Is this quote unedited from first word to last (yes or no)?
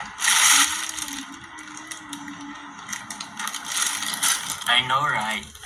yes